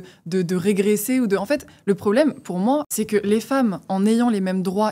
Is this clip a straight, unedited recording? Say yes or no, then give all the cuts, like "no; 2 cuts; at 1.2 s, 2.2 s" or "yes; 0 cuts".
no; 1 cut; at 2.9 s